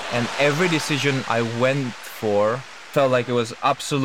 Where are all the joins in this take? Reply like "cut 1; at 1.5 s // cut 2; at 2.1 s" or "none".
cut 1; at 2.7 s